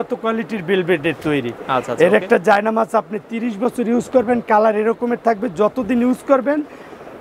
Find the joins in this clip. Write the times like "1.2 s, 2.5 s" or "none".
none